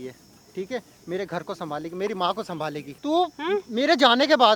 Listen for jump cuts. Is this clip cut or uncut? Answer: cut